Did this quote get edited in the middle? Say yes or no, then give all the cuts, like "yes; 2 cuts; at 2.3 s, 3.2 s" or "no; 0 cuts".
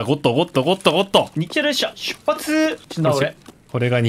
yes; 2 cuts; at 1.3 s, 3.0 s